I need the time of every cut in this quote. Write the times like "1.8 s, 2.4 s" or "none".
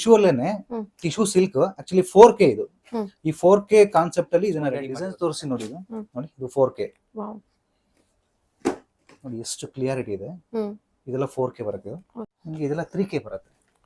4.8 s, 12.3 s